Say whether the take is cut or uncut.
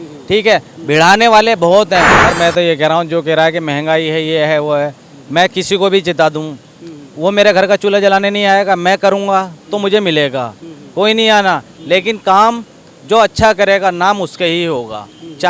cut